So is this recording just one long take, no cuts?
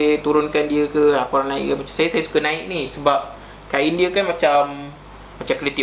yes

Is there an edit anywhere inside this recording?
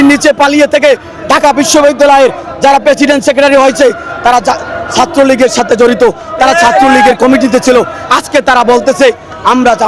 no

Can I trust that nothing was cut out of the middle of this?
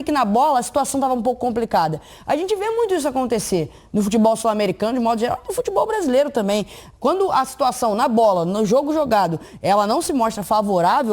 yes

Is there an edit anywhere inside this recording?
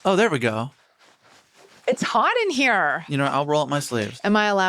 yes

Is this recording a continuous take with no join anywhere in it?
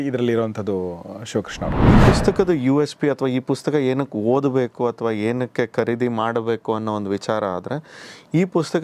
no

